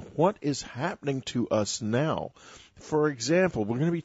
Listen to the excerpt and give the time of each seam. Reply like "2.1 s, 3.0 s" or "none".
2.1 s